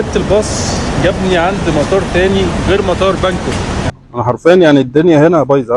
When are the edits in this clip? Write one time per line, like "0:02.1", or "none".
0:03.8